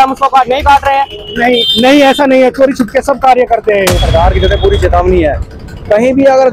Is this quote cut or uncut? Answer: cut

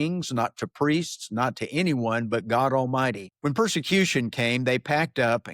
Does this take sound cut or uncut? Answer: cut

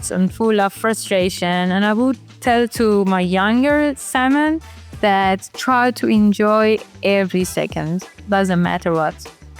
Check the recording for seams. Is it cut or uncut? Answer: uncut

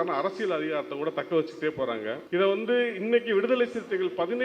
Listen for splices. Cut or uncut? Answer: cut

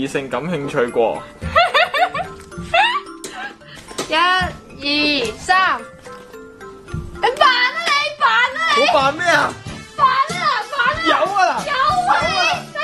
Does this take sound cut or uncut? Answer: uncut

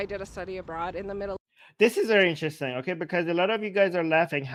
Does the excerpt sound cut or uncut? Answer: uncut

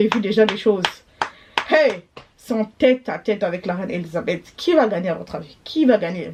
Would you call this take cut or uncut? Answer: uncut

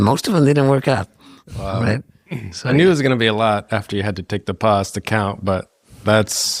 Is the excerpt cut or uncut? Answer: uncut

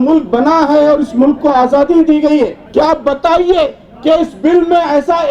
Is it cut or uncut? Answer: cut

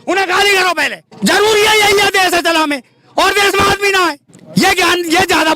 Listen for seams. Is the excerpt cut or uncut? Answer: cut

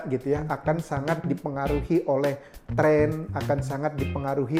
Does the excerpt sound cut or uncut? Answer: uncut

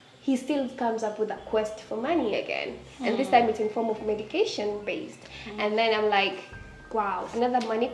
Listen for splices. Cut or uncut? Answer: uncut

